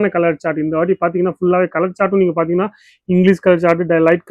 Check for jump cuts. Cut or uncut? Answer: uncut